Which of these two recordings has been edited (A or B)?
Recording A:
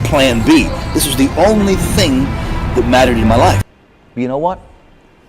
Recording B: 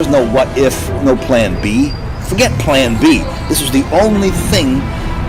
A